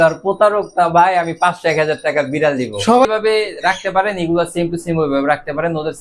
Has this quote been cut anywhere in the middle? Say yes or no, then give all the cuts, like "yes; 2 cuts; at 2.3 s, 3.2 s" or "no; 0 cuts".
yes; 1 cut; at 3.1 s